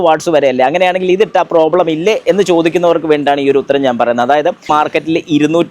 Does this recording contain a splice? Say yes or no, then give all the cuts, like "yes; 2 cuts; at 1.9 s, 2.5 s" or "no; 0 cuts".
yes; 1 cut; at 4.7 s